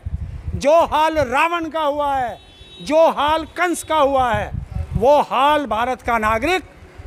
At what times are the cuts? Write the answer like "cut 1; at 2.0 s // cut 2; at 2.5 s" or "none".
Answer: none